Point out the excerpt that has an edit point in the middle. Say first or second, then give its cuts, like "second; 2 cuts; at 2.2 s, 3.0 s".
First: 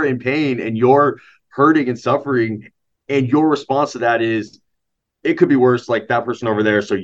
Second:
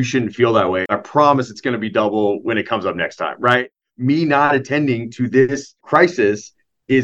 second; 3 cuts; at 0.9 s, 3.7 s, 5.8 s